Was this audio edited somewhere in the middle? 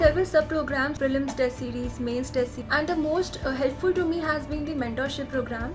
yes; 2 cuts; at 1.0 s, 2.6 s

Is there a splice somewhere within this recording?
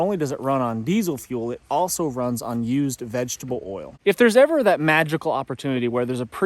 yes; 1 cut; at 3.9 s

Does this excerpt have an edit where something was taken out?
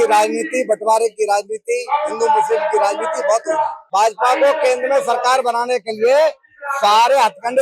yes; 1 cut; at 3.8 s

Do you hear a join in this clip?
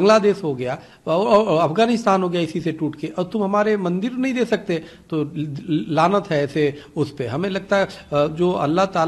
no; 0 cuts

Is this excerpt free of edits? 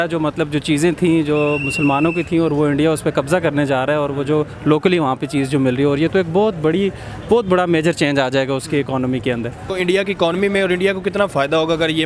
yes; 0 cuts

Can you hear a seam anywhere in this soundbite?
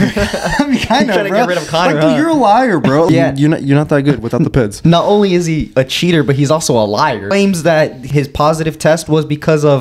yes; 3 cuts; at 3.1 s, 7.3 s, 8.0 s

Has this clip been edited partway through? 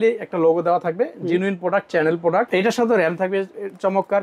yes; 1 cut; at 2.5 s

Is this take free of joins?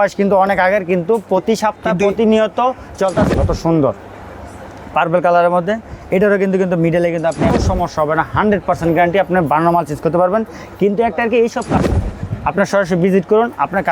no; 3 cuts; at 3.3 s, 7.5 s, 11.7 s

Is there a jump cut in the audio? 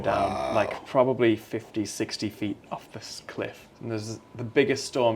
yes; 1 cut; at 3.7 s

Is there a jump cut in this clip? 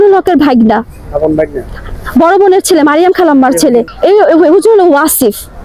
no; 0 cuts

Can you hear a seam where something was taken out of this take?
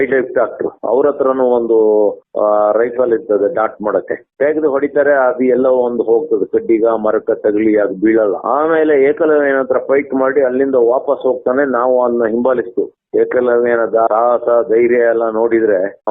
yes; 2 cuts; at 13.0 s, 14.1 s

